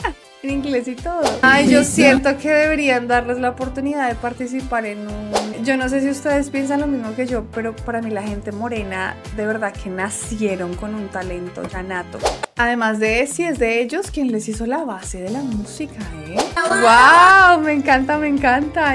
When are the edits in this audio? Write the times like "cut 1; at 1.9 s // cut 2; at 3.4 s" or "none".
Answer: cut 1; at 1.4 s // cut 2; at 5.6 s // cut 3; at 12.4 s // cut 4; at 16.6 s